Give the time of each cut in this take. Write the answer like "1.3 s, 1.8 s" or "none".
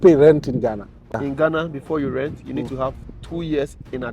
1.1 s